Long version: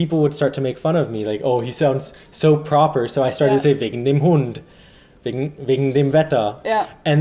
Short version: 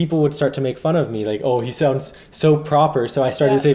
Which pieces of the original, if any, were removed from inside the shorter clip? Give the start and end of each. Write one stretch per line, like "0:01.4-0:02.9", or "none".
none